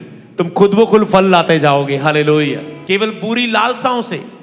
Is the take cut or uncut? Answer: cut